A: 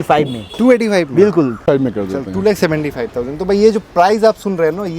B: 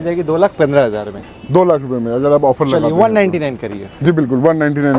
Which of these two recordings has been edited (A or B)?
A